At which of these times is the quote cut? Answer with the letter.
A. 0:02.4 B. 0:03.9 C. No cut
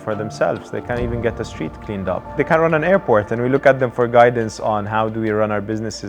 A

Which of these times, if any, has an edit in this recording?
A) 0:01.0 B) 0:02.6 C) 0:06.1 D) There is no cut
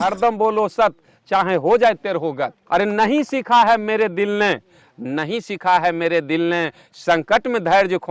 B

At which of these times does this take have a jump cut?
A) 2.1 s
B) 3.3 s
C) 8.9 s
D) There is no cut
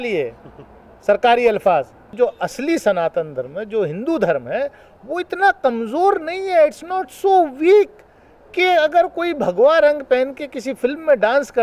A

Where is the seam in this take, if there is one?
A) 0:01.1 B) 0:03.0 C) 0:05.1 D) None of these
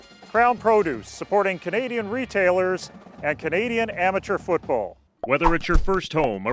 C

